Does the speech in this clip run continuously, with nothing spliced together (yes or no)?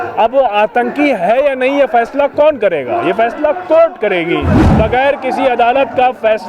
no